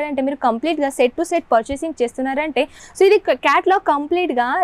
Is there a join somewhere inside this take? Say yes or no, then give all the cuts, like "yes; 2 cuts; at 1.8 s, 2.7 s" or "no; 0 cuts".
yes; 1 cut; at 2.8 s